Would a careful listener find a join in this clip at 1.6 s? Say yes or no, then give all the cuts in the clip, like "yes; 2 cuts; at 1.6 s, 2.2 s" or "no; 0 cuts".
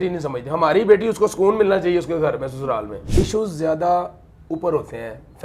no; 1 cut; at 3.0 s